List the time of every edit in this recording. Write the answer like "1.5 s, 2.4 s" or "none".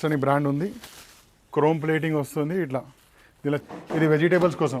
3.7 s